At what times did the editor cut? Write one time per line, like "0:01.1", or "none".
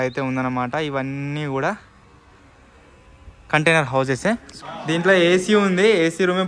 0:04.5